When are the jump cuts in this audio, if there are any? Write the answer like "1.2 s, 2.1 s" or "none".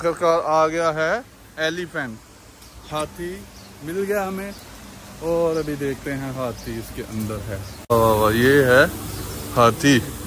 7.9 s